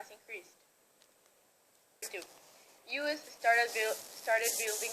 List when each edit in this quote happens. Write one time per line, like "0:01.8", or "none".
0:02.0